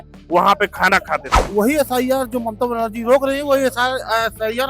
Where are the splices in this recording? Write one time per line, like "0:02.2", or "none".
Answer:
0:01.4